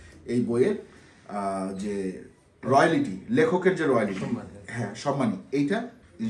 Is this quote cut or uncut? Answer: uncut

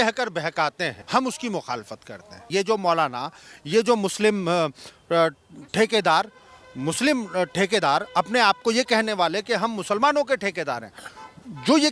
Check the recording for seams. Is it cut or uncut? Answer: cut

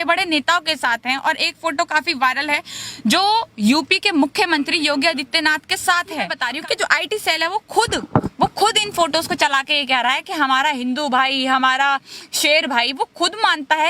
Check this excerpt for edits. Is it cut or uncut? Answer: cut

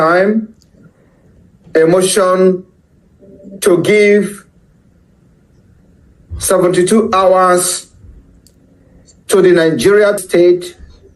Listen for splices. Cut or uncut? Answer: cut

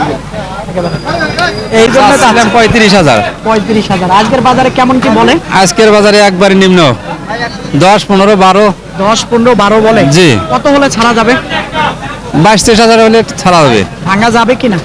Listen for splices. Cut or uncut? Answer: cut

